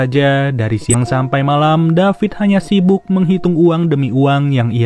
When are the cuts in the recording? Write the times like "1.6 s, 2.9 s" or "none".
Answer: 0.9 s